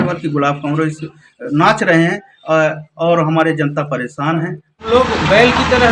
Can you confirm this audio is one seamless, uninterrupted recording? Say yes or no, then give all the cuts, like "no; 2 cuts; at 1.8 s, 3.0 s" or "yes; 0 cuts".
no; 1 cut; at 4.8 s